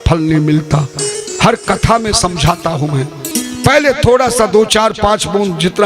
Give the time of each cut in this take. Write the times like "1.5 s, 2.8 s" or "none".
1.2 s, 3.3 s